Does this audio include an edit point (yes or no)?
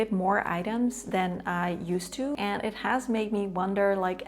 yes